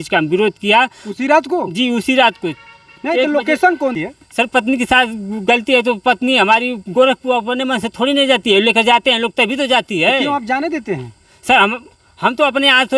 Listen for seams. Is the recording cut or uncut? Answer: cut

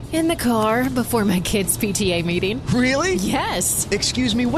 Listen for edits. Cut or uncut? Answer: uncut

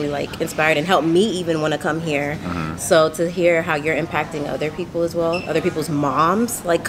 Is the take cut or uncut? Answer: uncut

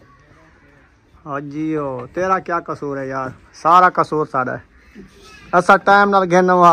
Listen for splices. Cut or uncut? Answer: uncut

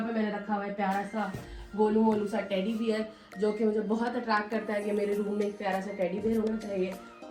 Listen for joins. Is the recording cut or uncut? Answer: uncut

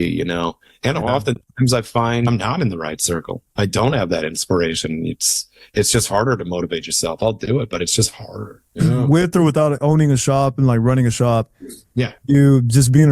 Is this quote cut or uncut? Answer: cut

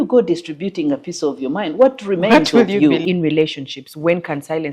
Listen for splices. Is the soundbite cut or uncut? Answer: cut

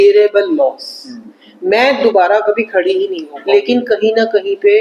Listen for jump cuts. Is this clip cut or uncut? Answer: cut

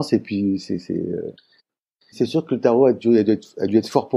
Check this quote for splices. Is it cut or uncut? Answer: cut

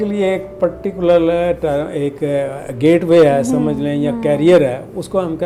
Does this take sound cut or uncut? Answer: uncut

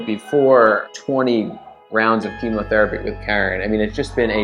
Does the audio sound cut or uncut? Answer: cut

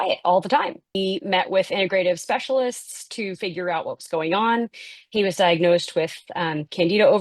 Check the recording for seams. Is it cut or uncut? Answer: cut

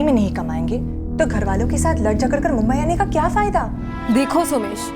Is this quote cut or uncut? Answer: cut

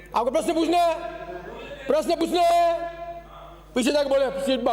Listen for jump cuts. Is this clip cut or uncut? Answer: uncut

